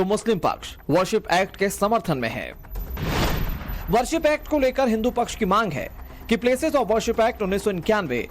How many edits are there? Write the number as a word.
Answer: one